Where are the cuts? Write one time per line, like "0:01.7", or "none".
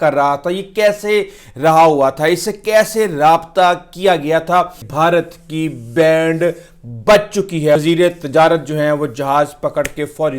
0:04.9
0:07.8

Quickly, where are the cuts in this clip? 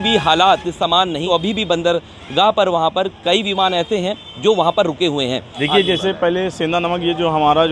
0:01.2
0:05.6

